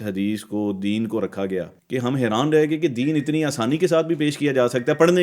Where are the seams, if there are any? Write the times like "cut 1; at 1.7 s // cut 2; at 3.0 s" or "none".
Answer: cut 1; at 1.8 s